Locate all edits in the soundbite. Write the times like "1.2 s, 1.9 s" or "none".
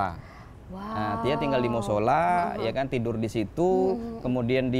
none